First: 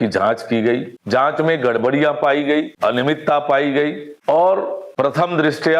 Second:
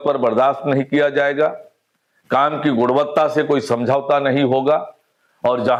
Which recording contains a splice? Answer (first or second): first